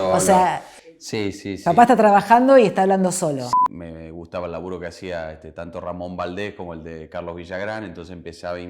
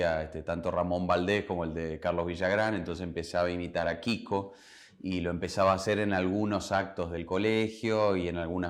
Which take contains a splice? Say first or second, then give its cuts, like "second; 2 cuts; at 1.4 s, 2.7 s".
first; 1 cut; at 3.5 s